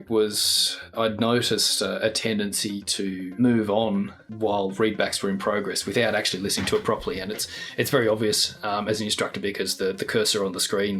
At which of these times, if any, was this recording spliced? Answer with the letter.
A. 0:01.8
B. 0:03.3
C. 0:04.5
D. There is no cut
B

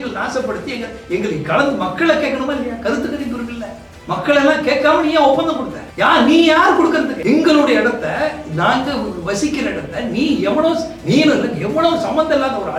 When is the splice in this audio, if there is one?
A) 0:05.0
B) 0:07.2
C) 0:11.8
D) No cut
B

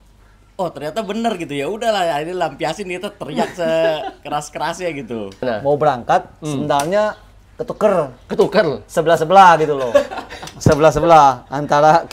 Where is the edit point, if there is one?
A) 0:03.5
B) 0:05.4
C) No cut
B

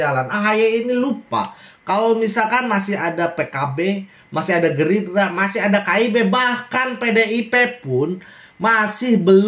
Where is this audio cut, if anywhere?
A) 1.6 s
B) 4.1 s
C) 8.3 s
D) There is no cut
D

